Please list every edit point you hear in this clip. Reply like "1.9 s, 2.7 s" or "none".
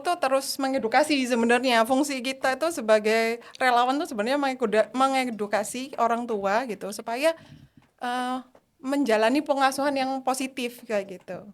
none